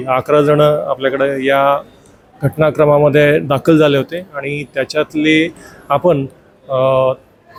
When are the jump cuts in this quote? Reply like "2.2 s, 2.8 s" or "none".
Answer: none